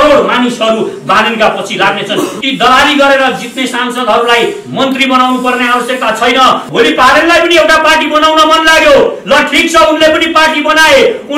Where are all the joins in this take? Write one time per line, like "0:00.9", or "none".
0:02.4
0:06.7

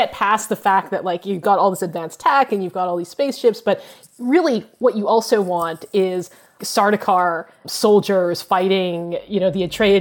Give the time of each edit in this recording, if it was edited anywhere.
0:06.6
0:07.6

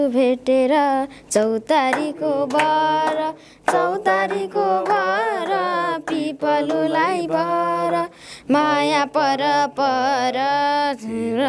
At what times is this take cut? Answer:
none

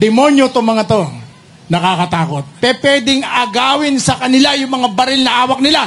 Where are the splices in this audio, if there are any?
0:02.5

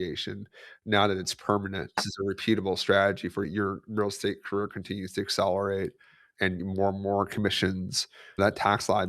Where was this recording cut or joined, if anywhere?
0:02.1
0:03.5
0:06.6
0:08.4

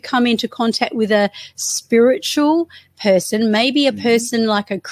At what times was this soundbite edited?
none

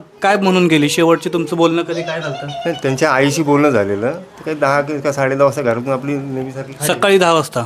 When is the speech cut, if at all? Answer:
none

